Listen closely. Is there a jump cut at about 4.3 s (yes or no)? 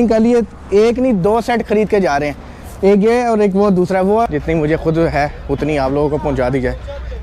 yes